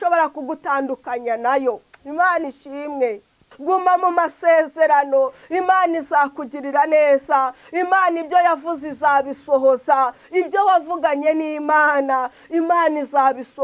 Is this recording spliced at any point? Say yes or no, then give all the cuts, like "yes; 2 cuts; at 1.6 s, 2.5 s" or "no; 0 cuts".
yes; 1 cut; at 3.5 s